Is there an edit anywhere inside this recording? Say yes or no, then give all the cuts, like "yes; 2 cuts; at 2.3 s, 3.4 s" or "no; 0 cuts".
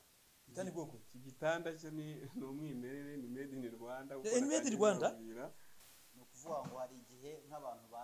yes; 1 cut; at 5.7 s